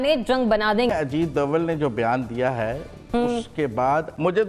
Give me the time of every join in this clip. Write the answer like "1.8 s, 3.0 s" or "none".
0.9 s